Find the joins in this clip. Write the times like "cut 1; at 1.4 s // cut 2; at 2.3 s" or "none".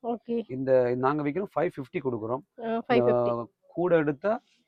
none

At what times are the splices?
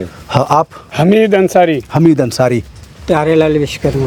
none

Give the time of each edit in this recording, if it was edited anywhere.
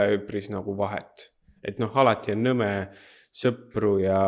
none

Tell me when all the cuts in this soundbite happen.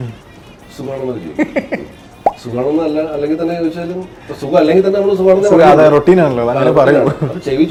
none

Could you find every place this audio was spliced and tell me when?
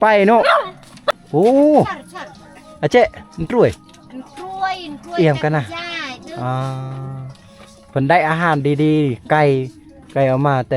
cut 1; at 1.0 s

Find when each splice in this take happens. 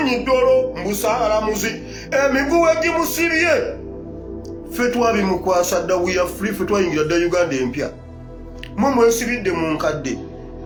none

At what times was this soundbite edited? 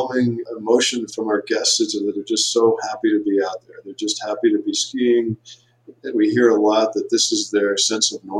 cut 1; at 1.0 s

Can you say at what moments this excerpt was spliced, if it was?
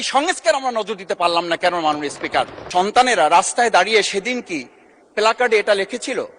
cut 1; at 2.6 s

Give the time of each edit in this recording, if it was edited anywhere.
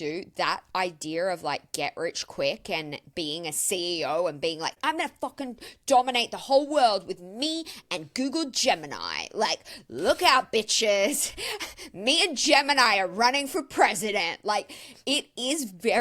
cut 1; at 4.8 s

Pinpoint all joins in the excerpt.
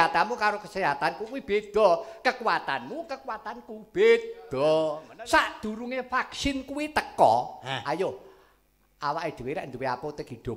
cut 1; at 5.1 s

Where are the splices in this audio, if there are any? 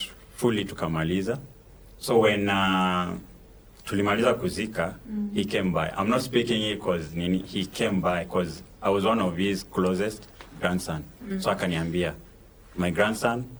none

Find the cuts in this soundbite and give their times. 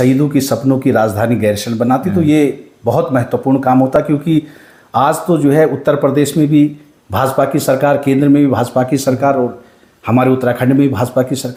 none

